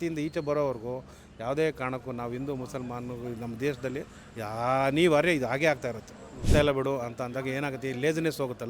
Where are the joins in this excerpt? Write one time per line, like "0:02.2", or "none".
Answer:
0:06.5